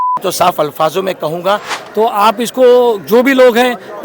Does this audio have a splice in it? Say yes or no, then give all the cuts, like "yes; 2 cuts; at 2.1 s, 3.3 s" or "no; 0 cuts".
yes; 1 cut; at 1.8 s